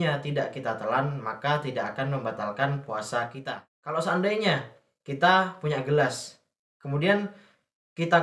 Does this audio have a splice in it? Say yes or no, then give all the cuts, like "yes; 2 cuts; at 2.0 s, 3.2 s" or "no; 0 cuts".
yes; 1 cut; at 3.4 s